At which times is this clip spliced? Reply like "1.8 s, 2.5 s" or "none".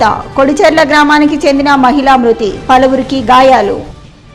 none